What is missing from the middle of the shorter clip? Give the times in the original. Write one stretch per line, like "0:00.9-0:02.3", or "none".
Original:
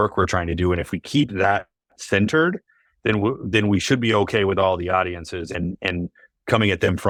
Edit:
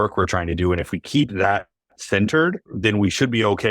0:02.7-0:03.4